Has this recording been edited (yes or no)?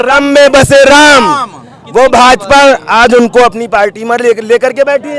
no